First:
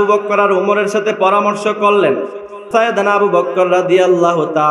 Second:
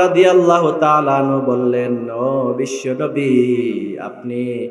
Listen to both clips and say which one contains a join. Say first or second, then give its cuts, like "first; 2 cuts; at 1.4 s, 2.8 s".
first; 1 cut; at 2.6 s